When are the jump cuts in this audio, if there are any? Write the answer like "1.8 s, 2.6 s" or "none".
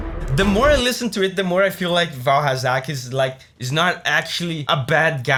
none